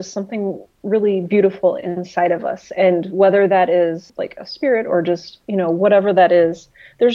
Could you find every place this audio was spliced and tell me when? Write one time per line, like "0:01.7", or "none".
0:04.1